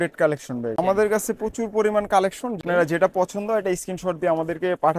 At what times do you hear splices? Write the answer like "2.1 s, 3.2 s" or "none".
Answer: 0.8 s, 2.6 s